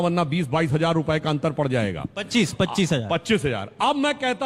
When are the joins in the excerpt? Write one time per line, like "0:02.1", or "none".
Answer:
none